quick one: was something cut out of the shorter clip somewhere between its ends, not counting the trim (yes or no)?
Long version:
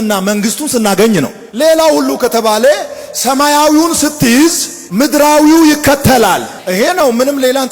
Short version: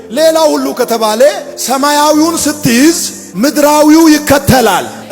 yes